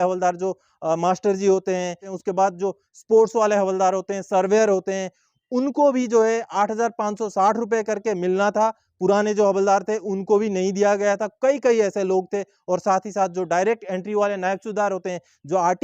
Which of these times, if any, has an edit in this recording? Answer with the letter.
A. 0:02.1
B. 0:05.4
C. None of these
A